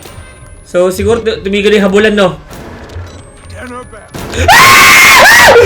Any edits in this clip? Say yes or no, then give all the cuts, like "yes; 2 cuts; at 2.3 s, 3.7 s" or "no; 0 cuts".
no; 0 cuts